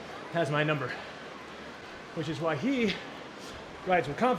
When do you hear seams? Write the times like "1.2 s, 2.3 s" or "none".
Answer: 1.8 s